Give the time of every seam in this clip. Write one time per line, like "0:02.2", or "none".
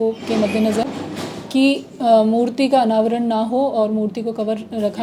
none